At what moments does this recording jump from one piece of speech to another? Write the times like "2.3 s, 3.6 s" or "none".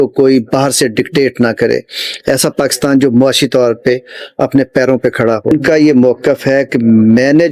5.4 s